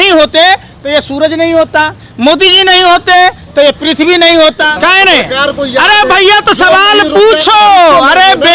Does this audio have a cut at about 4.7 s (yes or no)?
yes